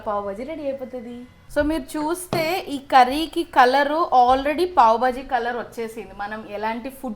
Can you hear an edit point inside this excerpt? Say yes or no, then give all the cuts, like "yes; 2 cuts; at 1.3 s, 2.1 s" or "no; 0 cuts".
yes; 1 cut; at 1.4 s